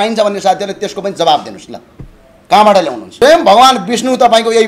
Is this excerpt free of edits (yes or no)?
no